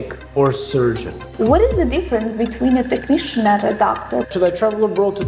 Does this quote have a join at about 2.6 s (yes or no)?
no